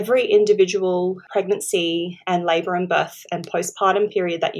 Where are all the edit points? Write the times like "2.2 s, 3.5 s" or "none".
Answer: 1.2 s